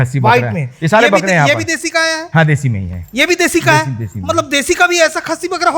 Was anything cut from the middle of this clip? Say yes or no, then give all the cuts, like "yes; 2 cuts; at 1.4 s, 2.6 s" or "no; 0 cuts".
no; 0 cuts